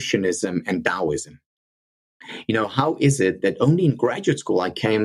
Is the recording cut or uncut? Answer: uncut